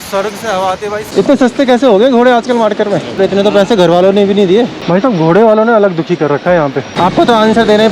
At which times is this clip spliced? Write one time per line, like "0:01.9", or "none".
0:01.1
0:03.2
0:04.8
0:06.8